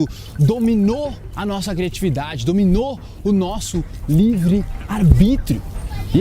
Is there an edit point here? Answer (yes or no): yes